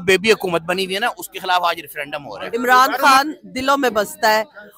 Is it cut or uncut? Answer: cut